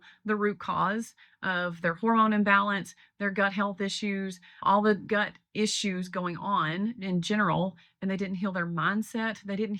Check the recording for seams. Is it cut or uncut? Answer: uncut